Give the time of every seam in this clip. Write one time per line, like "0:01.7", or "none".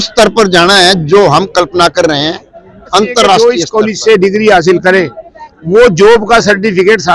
0:03.4